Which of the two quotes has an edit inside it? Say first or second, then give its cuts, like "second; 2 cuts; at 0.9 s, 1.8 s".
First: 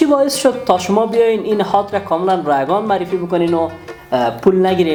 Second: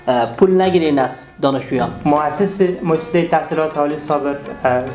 second; 1 cut; at 2.0 s